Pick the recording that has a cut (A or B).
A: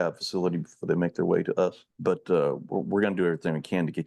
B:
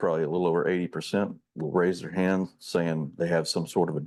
A